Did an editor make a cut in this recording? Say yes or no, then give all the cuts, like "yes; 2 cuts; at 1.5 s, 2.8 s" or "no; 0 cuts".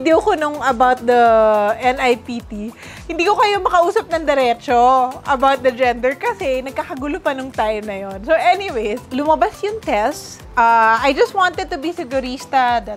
no; 0 cuts